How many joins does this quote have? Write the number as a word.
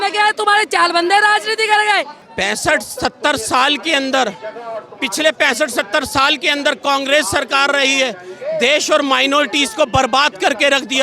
one